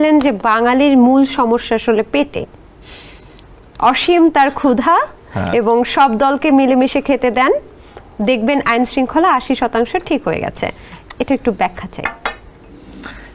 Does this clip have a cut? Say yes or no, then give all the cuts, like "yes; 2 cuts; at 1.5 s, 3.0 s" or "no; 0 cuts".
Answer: no; 0 cuts